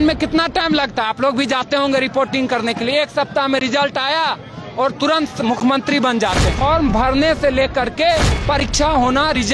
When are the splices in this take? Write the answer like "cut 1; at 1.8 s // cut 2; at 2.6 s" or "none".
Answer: cut 1; at 6.5 s